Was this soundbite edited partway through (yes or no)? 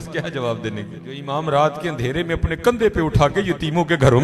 yes